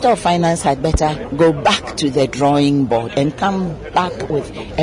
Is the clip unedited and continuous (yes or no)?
no